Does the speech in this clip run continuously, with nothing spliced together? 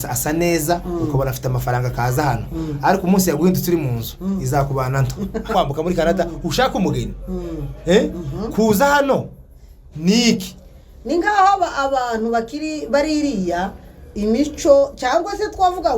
no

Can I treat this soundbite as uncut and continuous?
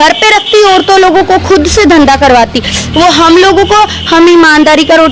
yes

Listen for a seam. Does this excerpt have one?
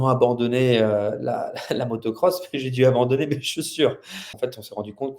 yes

